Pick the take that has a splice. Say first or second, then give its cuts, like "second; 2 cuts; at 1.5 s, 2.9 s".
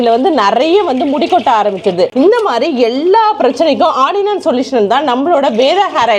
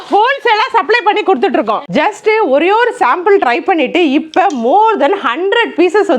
second; 1 cut; at 1.9 s